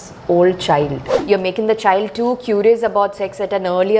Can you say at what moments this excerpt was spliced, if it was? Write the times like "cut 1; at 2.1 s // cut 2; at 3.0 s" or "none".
cut 1; at 1.1 s